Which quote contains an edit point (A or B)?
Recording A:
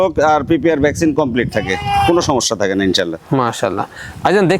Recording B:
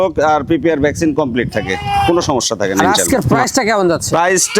B